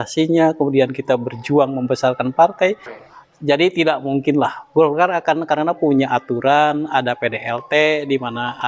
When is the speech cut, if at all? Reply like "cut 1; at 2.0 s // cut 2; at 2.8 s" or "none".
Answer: cut 1; at 2.9 s